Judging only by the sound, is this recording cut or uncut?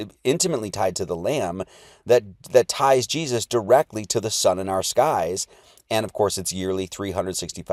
uncut